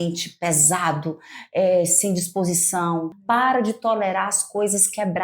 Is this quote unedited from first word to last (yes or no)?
no